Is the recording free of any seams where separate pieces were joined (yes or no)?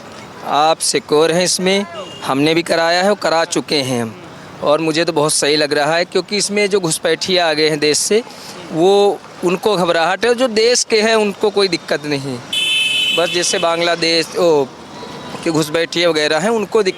yes